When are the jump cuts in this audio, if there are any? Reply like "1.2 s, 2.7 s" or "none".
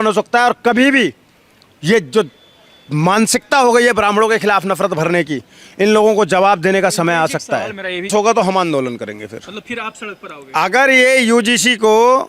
8.1 s